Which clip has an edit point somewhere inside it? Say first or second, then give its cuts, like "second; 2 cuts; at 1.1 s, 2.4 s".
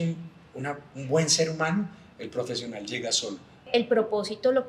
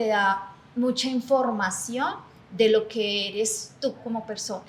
first; 1 cut; at 3.7 s